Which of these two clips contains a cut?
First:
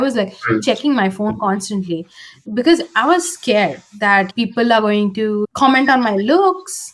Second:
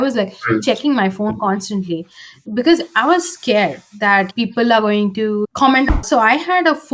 second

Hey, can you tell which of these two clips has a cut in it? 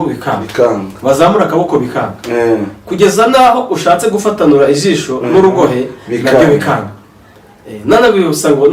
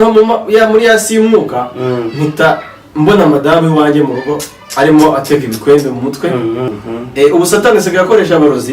second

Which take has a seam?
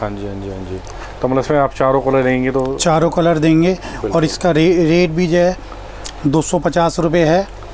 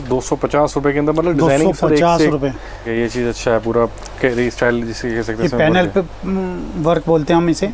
second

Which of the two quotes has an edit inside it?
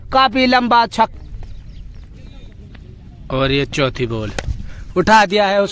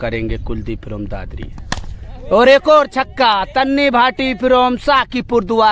first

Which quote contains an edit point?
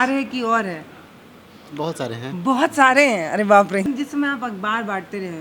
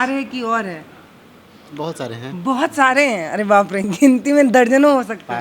first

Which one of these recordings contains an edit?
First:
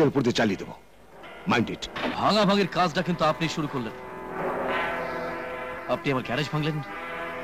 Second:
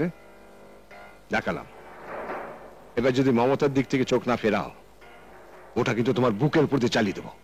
first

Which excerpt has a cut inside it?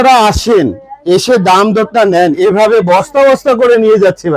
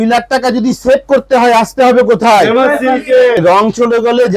second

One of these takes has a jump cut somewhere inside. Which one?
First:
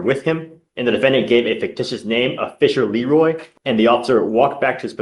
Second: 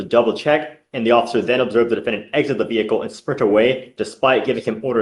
first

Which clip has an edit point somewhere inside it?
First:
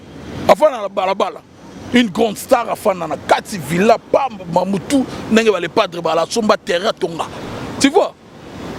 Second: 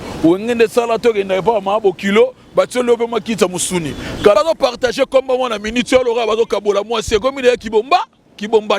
second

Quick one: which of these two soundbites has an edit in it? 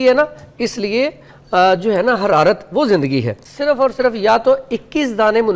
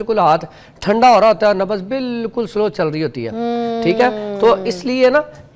first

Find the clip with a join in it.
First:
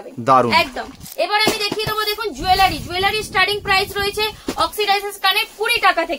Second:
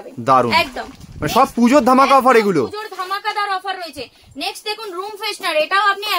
first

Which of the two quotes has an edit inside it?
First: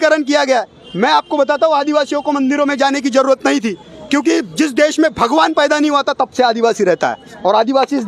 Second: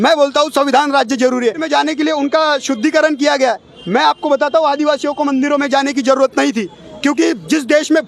second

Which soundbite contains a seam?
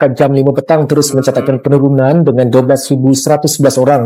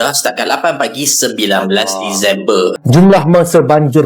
second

